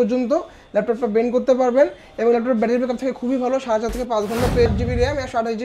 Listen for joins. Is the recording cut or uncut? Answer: cut